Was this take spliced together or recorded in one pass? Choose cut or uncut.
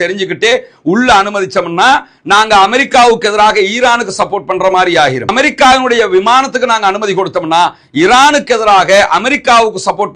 uncut